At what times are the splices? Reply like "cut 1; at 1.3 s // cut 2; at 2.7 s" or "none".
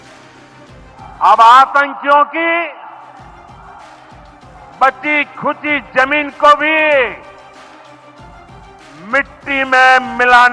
cut 1; at 1.0 s